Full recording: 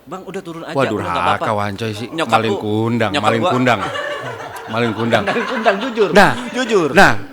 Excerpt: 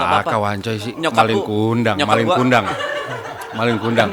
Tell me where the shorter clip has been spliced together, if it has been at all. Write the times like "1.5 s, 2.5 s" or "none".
none